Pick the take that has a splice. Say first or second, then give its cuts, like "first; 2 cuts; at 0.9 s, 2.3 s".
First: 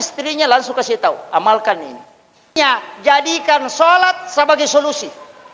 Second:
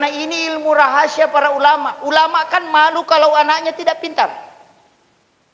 first; 1 cut; at 2.5 s